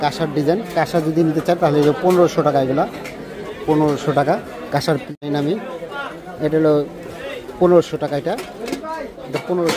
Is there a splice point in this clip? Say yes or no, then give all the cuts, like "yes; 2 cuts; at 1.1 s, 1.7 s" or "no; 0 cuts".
yes; 1 cut; at 5.1 s